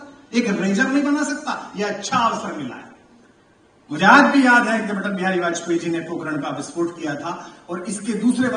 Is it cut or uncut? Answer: uncut